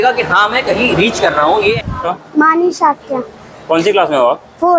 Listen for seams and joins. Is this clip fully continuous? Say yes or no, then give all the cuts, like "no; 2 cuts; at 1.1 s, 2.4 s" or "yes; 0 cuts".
no; 1 cut; at 1.8 s